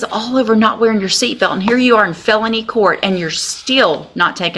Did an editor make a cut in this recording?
no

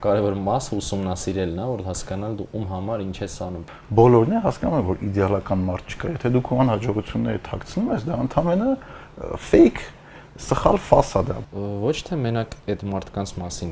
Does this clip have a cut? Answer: yes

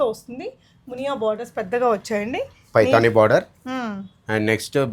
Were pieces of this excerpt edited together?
no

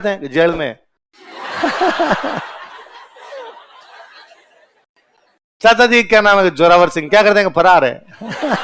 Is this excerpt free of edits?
yes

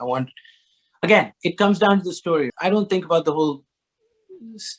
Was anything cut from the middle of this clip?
yes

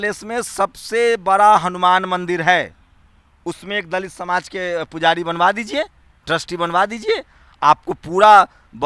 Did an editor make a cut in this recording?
no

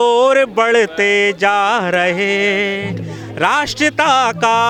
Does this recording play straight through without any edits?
yes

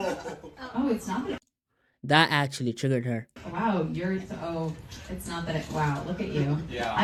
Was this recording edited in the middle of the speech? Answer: no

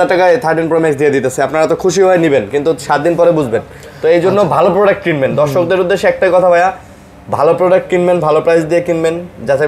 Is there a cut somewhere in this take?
no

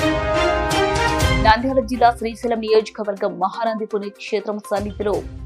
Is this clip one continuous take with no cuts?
no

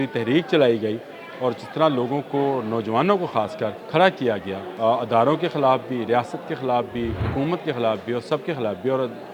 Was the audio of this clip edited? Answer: yes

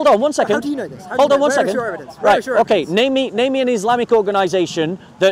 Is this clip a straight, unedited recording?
yes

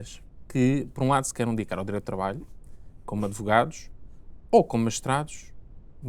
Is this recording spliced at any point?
no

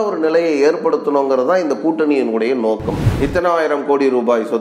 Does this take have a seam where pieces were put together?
yes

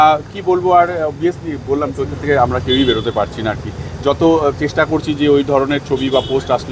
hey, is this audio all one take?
yes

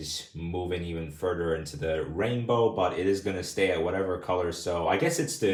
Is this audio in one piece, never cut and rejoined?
yes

